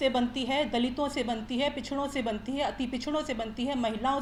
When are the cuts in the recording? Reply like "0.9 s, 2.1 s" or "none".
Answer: none